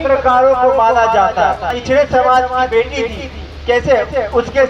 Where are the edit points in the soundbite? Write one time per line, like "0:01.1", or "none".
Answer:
0:01.8